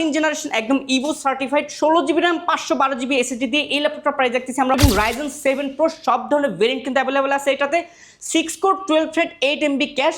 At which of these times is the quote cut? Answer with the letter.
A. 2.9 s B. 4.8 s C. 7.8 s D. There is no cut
B